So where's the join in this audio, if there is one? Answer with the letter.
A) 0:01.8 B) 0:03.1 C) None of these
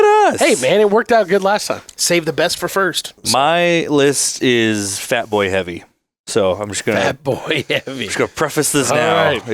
B